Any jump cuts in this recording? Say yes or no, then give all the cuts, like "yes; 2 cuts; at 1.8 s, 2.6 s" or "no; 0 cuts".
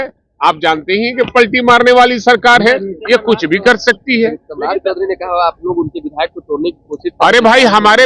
no; 0 cuts